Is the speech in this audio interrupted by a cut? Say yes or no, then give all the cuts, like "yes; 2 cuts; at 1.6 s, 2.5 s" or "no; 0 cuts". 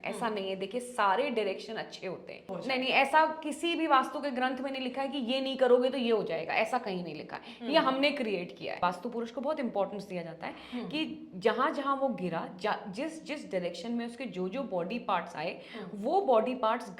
yes; 2 cuts; at 2.5 s, 8.8 s